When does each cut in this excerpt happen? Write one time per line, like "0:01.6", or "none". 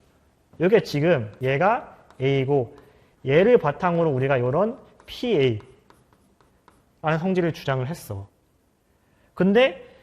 0:01.3